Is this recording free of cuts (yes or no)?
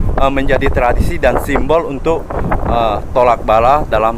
yes